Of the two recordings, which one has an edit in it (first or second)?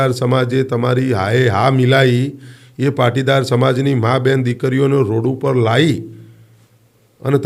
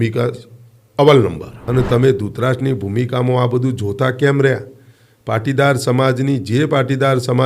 second